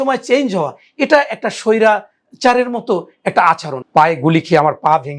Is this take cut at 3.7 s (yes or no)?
yes